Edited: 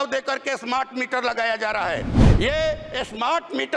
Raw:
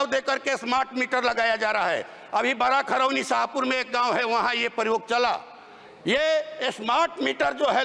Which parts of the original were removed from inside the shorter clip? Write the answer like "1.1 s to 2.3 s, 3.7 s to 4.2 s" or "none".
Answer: 2.2 s to 5.8 s